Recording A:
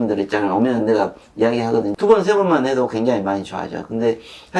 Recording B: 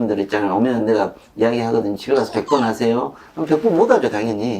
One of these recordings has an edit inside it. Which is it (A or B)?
A